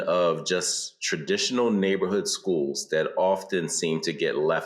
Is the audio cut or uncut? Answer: uncut